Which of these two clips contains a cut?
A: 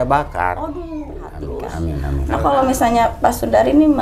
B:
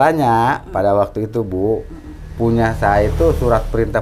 A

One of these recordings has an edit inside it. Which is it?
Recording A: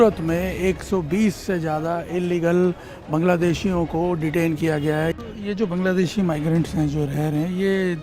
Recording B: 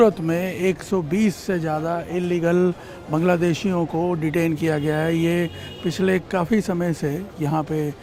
A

